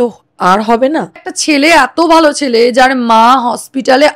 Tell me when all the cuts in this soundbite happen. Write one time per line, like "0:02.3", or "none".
0:01.3